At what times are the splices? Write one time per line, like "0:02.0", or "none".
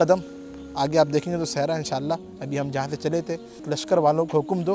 0:03.6

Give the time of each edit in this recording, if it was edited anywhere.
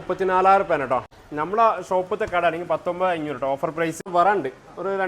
0:01.1
0:04.1

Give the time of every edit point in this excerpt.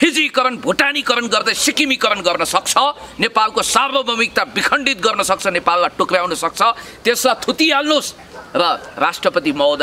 none

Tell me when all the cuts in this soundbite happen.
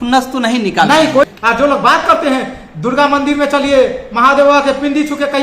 0:01.3

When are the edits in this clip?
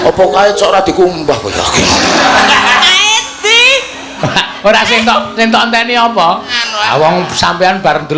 0:06.6

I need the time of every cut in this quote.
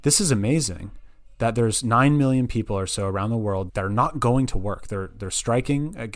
0:03.7

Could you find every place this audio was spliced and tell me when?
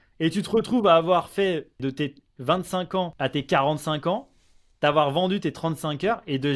0:01.8
0:03.1

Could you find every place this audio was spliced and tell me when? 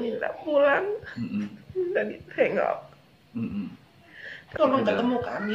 0:04.6

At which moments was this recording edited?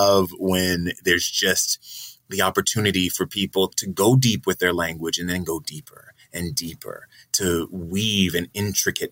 none

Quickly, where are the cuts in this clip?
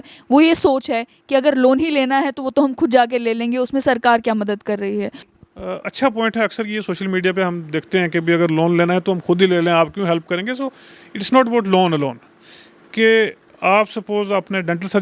0:05.2

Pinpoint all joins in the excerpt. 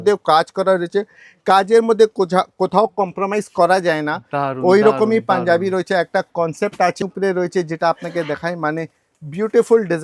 0:07.0

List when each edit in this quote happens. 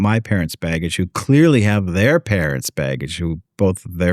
none

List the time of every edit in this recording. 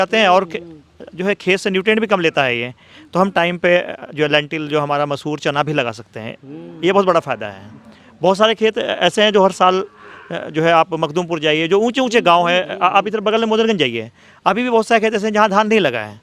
none

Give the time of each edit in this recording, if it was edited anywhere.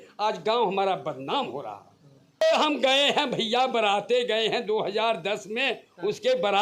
0:02.4

